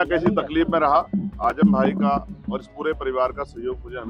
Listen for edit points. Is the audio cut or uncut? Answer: uncut